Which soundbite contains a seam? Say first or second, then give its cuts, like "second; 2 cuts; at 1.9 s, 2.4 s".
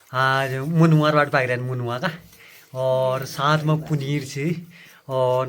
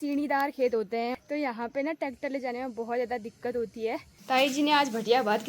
second; 2 cuts; at 1.1 s, 4.1 s